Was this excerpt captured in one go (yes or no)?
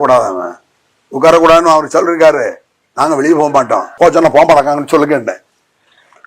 no